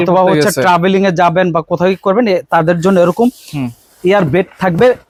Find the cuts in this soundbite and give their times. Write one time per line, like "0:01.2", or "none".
none